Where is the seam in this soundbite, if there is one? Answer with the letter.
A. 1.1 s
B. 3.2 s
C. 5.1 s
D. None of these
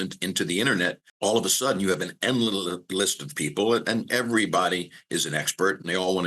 A